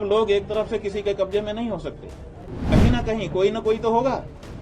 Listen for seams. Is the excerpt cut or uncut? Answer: cut